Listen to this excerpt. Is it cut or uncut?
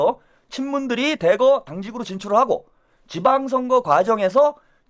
uncut